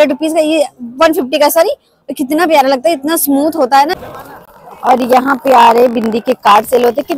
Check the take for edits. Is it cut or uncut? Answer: cut